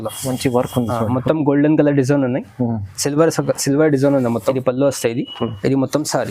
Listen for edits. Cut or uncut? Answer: cut